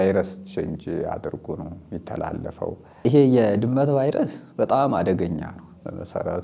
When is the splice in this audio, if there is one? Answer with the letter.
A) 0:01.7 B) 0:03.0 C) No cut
B